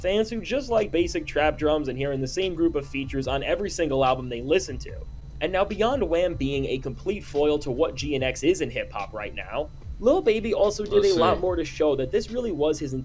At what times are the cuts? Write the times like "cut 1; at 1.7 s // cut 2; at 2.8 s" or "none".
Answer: none